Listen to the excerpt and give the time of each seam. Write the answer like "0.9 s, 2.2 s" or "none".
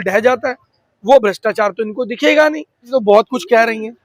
2.9 s